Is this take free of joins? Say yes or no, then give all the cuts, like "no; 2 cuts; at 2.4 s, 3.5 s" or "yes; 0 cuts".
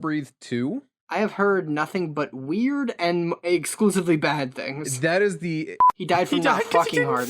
no; 1 cut; at 5.9 s